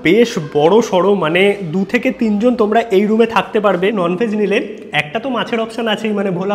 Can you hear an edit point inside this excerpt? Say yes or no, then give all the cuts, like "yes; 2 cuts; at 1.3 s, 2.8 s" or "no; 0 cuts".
yes; 1 cut; at 3.9 s